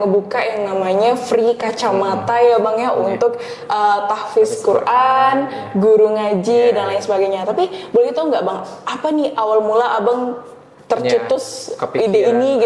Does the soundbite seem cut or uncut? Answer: uncut